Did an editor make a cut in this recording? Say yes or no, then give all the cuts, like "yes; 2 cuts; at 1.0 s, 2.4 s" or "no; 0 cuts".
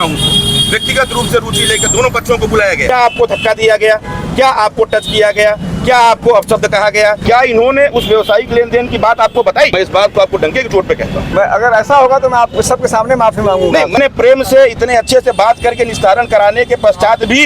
yes; 5 cuts; at 2.8 s, 7.2 s, 9.7 s, 11.3 s, 14.0 s